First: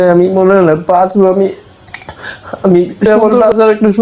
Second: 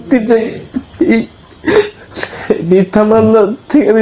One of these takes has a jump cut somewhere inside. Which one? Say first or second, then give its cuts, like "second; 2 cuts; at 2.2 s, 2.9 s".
first; 1 cut; at 3.1 s